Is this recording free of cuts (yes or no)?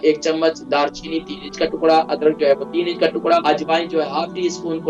no